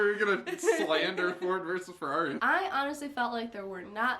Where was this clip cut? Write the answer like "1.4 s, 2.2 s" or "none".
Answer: 2.4 s